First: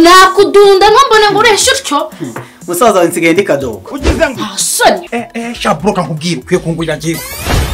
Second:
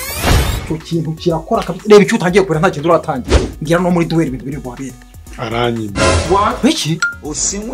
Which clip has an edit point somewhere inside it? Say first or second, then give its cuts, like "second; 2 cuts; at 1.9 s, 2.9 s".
first; 1 cut; at 5.1 s